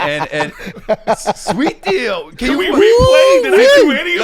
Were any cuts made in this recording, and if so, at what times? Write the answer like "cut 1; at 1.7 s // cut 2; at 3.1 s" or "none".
none